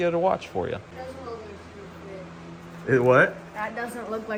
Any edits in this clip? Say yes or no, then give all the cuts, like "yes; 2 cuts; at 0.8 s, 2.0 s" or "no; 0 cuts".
no; 0 cuts